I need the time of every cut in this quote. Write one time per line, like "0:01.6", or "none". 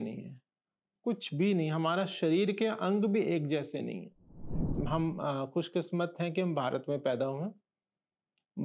0:04.7

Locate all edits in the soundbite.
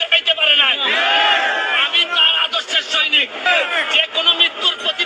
0:03.5

